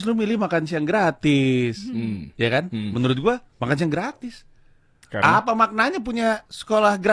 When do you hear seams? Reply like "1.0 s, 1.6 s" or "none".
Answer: none